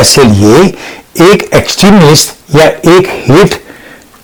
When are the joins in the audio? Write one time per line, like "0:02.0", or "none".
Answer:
none